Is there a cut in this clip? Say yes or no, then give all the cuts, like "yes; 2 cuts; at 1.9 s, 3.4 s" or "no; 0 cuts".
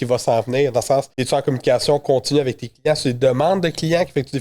yes; 1 cut; at 1.2 s